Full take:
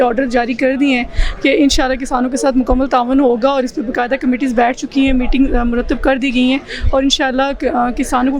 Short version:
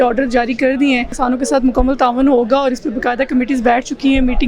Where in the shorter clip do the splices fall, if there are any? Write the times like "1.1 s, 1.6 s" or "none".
1.1 s